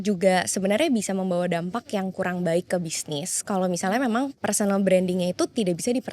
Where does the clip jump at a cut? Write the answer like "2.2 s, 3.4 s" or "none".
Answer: 4.4 s